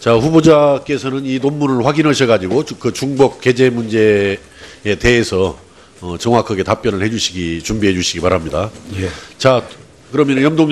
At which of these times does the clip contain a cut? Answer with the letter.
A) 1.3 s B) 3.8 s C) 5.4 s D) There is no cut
C